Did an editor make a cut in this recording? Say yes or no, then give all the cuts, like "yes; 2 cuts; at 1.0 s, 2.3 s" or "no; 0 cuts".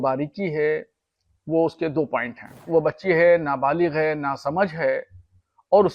yes; 1 cut; at 2.6 s